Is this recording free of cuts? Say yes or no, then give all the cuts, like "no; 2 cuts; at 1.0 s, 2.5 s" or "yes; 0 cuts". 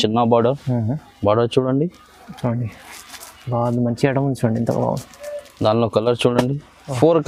yes; 0 cuts